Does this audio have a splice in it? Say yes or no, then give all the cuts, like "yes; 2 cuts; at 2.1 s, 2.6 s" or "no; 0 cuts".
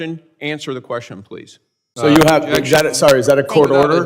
yes; 1 cut; at 1.8 s